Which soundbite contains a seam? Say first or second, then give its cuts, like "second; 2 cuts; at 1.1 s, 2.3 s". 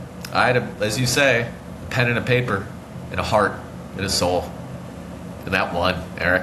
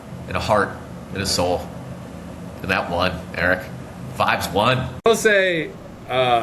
second; 1 cut; at 5.1 s